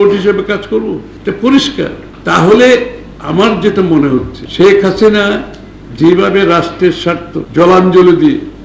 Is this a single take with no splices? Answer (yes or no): no